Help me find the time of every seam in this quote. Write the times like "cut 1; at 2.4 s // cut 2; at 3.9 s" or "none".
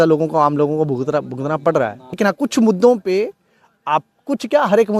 cut 1; at 2.2 s